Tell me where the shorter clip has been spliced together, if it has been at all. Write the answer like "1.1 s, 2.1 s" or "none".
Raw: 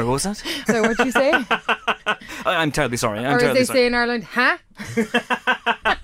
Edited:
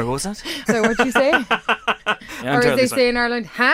2.4 s